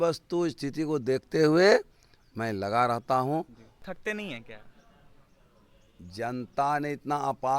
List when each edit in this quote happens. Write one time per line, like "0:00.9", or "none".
0:03.8

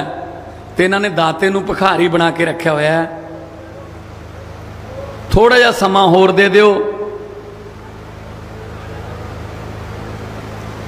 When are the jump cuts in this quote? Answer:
none

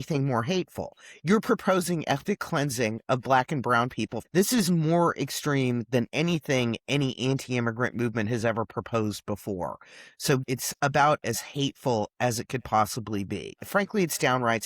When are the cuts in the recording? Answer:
0:04.2
0:10.4
0:13.6

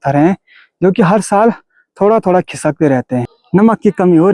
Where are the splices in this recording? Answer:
0:03.3

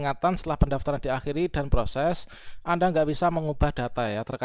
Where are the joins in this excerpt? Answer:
none

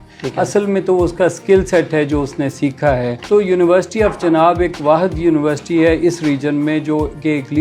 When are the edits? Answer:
0:03.2

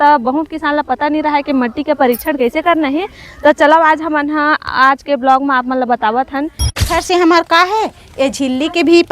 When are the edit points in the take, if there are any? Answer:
0:06.8

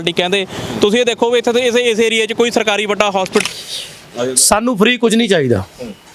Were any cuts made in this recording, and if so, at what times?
0:03.4

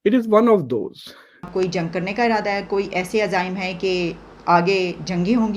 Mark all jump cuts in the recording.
0:01.5

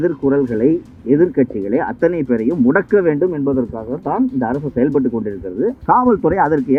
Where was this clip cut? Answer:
none

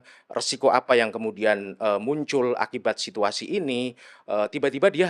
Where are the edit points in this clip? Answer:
none

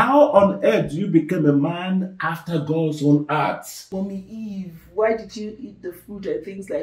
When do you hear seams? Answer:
0:03.8

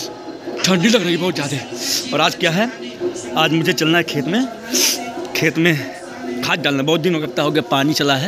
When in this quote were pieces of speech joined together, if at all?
none

